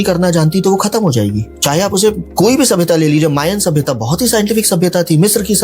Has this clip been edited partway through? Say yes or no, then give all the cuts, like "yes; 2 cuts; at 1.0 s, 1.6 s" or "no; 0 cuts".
no; 0 cuts